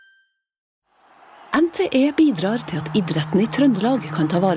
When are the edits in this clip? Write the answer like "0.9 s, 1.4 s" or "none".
1.2 s